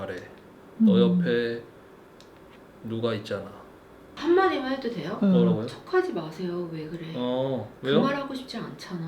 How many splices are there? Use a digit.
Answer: 1